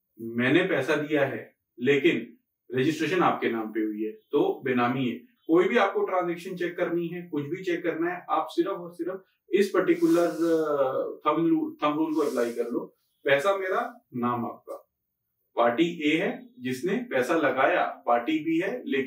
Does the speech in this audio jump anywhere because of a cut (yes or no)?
no